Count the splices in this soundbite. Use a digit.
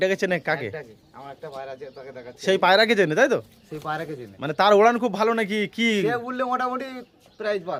0